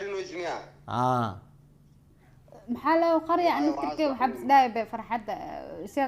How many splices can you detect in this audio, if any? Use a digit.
0